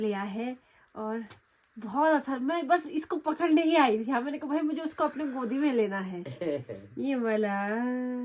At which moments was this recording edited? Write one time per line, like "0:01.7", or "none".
none